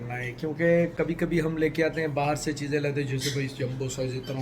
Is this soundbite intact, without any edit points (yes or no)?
yes